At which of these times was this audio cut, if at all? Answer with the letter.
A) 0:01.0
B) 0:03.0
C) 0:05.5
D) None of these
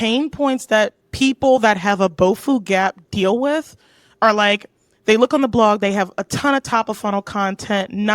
A